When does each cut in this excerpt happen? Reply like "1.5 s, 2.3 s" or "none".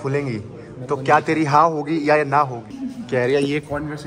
2.7 s